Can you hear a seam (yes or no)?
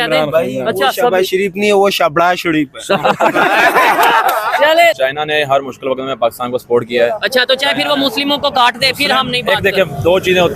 yes